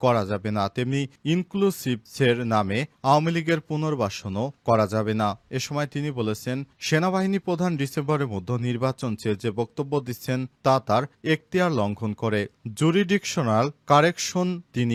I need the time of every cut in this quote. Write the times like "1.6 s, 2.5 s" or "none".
none